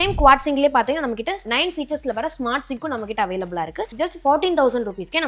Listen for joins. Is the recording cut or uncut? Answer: uncut